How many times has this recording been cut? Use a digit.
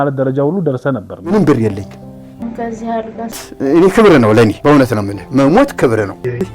1